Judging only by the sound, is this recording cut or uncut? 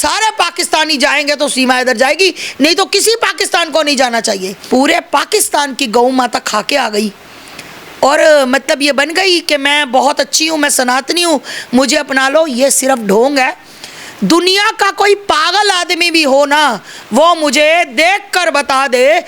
cut